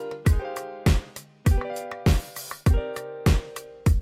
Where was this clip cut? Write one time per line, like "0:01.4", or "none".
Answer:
0:03.0

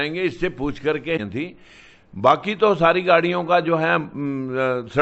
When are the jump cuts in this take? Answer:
0:01.2

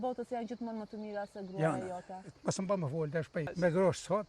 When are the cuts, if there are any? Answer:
0:02.2
0:03.5

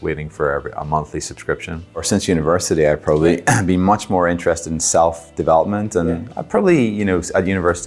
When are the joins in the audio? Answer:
0:02.1

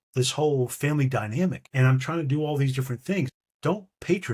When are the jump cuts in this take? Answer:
0:01.6
0:03.4

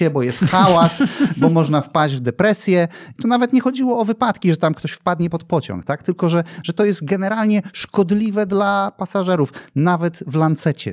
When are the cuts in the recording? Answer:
none

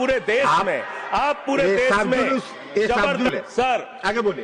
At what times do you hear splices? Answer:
0:03.3

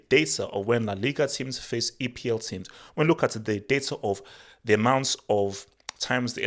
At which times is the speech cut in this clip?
none

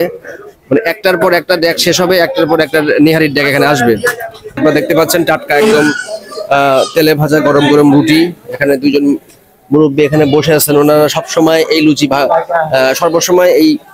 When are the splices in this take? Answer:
0:04.6

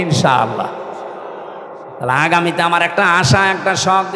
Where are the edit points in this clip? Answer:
0:01.9

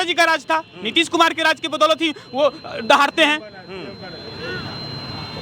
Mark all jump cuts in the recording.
none

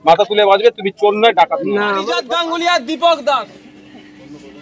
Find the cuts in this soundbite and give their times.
0:02.0

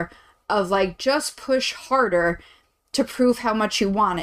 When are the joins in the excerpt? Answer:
none

